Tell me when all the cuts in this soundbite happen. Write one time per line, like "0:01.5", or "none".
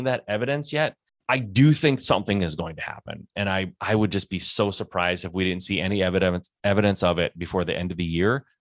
0:01.1